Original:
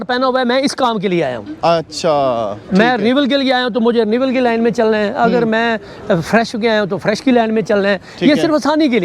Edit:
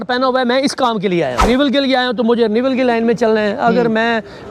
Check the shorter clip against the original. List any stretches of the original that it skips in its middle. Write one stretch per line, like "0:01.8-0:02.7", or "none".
0:01.4-0:03.0